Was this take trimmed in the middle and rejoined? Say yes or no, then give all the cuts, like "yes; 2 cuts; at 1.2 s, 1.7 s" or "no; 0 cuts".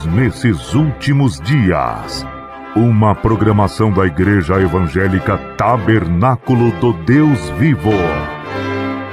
yes; 1 cut; at 8.1 s